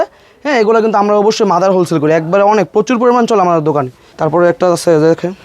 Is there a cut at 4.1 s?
yes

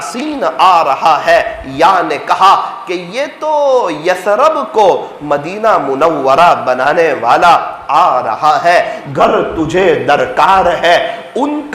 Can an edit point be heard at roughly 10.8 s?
no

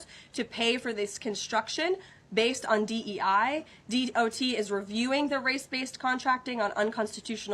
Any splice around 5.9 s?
yes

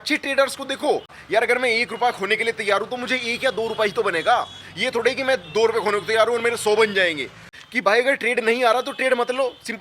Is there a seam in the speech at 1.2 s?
yes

